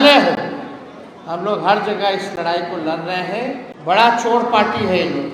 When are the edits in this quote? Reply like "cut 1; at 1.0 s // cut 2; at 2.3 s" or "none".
cut 1; at 3.7 s